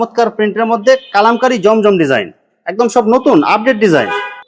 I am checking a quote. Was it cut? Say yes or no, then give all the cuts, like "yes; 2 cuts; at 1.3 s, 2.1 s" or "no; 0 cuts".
no; 0 cuts